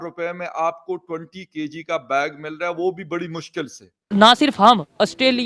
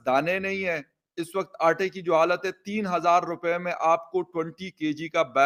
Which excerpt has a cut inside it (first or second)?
first